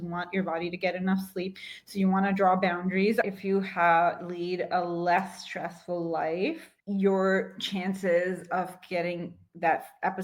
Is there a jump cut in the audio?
yes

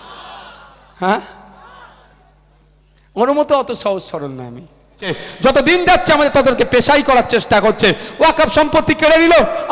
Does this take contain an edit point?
yes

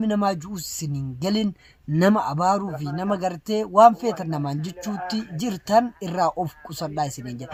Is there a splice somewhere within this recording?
no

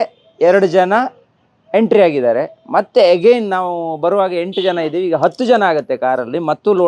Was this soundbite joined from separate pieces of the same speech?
no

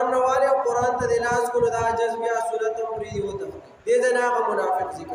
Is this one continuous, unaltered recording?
no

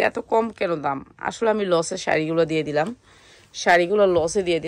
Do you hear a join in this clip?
no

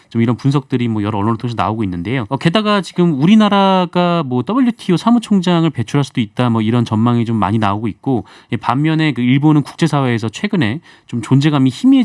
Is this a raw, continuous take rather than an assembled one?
no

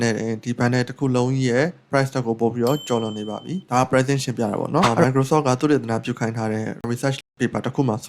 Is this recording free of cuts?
no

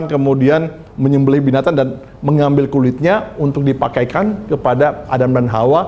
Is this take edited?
no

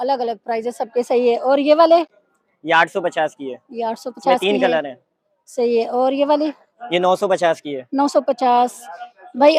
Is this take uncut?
yes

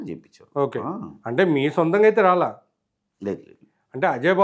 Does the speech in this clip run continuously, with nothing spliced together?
yes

